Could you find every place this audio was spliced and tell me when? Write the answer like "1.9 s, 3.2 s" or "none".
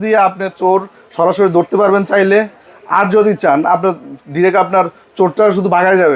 none